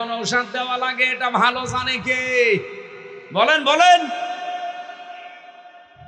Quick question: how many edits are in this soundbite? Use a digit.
0